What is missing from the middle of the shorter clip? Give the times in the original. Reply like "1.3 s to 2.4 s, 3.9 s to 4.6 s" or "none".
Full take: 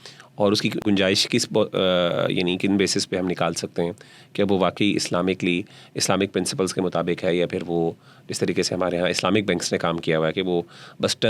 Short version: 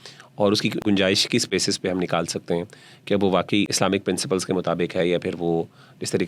1.5 s to 2.8 s, 4.9 s to 5.9 s